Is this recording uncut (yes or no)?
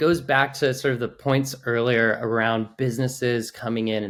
yes